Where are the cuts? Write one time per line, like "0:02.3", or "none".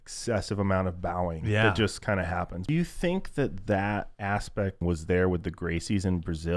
0:02.6
0:04.8